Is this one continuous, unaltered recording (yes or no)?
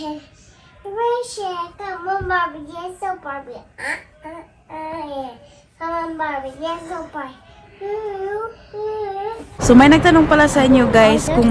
no